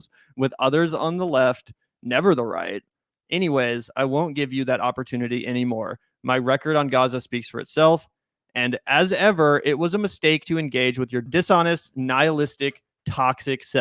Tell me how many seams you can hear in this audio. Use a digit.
1